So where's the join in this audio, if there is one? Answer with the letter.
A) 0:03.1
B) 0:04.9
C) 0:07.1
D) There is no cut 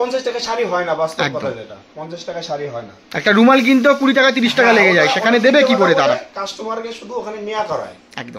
D